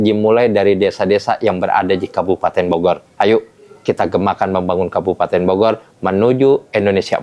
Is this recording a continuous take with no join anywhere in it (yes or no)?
yes